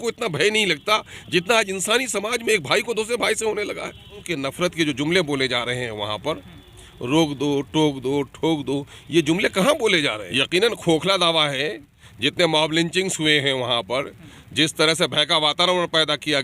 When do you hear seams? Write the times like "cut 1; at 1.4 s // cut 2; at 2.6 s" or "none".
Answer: cut 1; at 4.3 s // cut 2; at 10.3 s